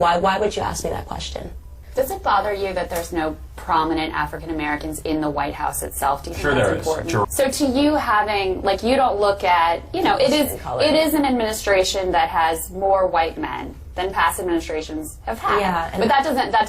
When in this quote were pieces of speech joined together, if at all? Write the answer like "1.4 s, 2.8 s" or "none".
1.8 s, 7.2 s